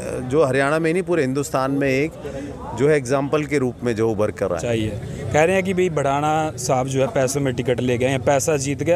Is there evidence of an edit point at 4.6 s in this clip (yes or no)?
yes